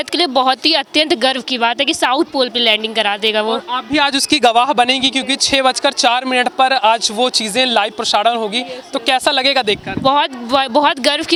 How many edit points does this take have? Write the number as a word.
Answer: zero